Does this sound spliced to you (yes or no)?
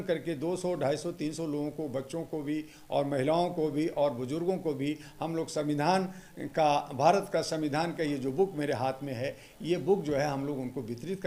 no